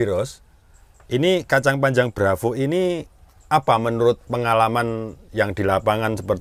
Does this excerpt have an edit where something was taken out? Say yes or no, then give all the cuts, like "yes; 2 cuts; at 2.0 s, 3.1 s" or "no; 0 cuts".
no; 0 cuts